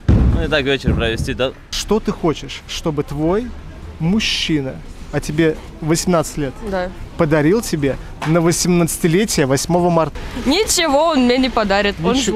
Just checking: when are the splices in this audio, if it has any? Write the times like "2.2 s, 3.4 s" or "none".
1.7 s, 10.2 s